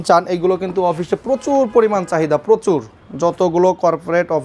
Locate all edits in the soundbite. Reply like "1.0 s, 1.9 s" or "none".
none